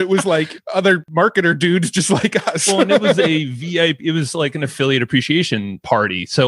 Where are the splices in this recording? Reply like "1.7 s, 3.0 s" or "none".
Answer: 0.9 s